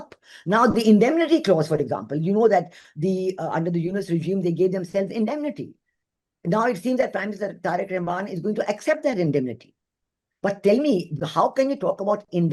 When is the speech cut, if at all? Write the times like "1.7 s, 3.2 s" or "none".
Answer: none